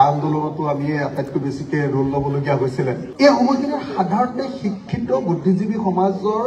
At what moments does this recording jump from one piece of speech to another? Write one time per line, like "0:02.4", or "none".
0:03.1